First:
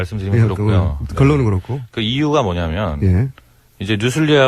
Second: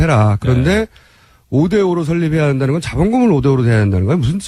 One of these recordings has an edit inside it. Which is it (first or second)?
first